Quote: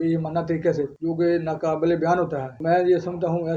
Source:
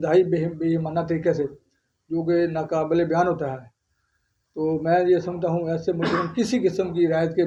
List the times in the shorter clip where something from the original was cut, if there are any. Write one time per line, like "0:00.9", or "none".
0:00.9
0:02.6